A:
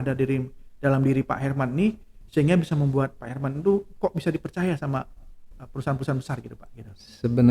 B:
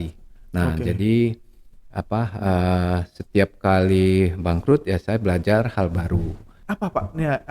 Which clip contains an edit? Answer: B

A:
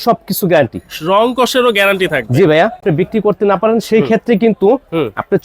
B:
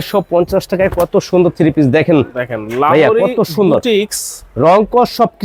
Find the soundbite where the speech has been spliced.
A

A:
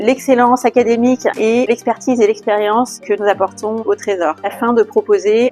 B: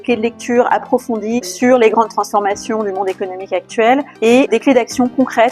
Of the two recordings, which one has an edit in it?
B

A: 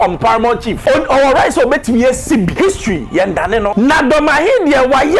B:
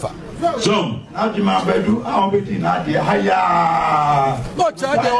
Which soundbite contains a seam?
A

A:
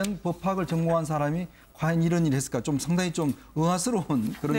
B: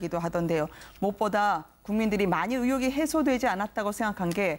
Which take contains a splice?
A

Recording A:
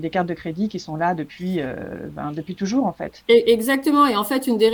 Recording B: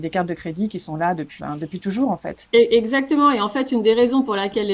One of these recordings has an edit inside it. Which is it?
B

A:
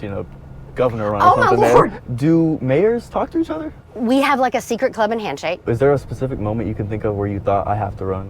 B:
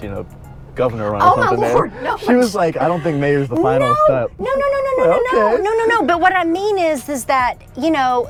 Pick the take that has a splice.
A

